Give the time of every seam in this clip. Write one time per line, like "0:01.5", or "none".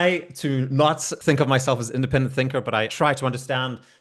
0:01.1
0:02.9